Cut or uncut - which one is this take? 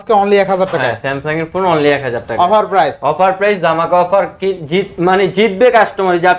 uncut